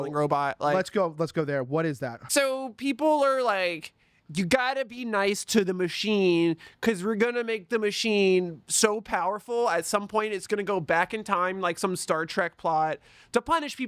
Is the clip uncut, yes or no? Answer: no